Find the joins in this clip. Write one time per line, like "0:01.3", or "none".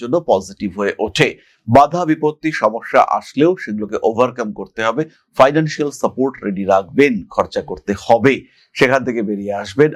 none